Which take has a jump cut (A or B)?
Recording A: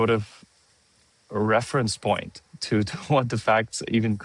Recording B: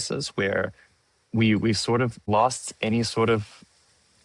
B